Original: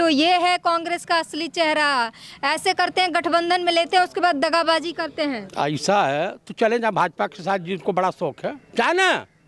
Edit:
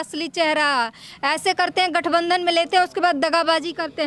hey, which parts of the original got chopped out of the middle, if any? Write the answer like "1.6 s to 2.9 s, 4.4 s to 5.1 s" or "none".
none